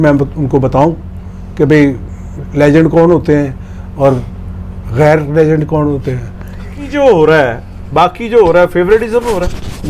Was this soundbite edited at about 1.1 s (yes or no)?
no